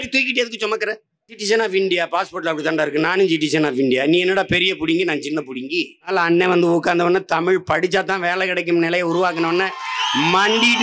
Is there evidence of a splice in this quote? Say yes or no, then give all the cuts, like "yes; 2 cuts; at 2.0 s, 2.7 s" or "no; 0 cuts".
yes; 2 cuts; at 1.4 s, 6.1 s